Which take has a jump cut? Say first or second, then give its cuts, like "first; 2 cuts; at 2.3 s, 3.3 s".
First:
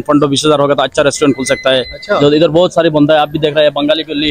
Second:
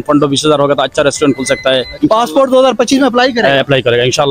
second; 1 cut; at 1.9 s